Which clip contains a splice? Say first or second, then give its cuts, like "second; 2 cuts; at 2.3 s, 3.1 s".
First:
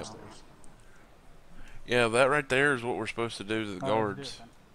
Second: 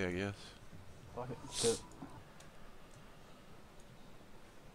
first; 1 cut; at 3.8 s